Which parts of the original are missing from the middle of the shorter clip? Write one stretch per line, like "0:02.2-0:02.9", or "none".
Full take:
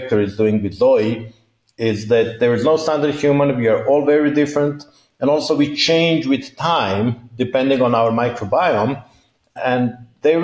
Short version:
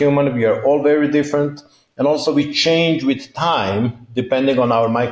none